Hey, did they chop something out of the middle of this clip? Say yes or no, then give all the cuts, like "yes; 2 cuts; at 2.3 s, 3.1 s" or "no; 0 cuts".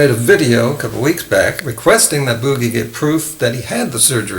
yes; 1 cut; at 1.7 s